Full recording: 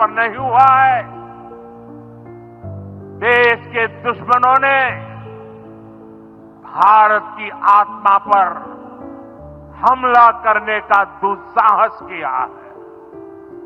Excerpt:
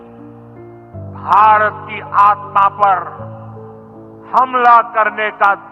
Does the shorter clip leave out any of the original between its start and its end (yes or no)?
yes